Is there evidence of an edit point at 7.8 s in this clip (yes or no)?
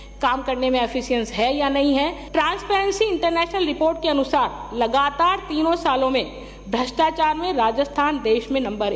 no